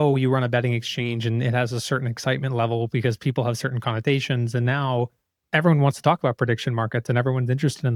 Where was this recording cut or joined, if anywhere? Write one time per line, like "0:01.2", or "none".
none